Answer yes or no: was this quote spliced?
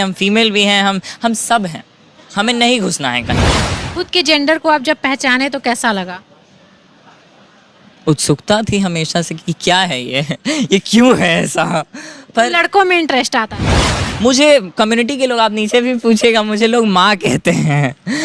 yes